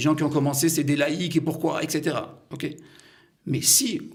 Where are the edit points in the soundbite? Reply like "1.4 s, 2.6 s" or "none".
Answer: none